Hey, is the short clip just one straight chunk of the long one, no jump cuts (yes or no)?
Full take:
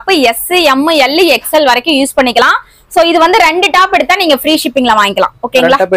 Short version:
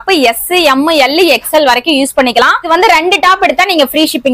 no